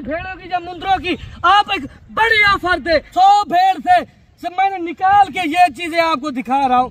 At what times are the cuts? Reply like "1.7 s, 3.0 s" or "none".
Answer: 3.1 s